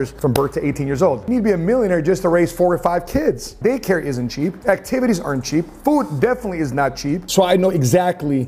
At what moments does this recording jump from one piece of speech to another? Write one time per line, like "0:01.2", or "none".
0:01.2
0:03.5
0:07.2